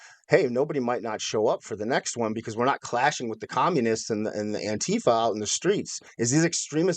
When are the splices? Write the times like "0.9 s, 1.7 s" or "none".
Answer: 6.0 s